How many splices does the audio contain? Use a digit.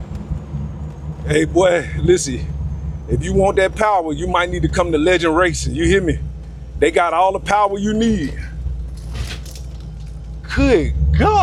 0